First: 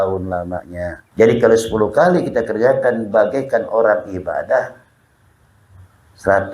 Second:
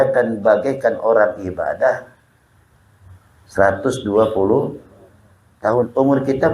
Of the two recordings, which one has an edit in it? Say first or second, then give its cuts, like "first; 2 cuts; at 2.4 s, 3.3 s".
first; 1 cut; at 1.0 s